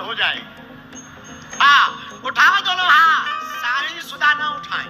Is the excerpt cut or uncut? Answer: cut